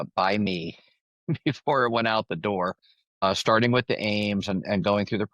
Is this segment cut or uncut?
cut